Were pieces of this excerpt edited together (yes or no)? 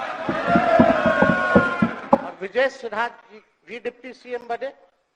yes